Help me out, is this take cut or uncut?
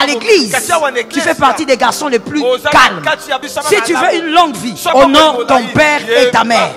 cut